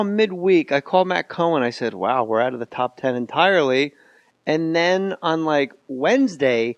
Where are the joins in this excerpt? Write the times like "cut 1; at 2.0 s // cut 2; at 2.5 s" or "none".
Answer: cut 1; at 3.0 s